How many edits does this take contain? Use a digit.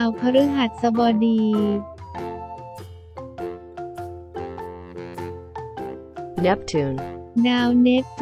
0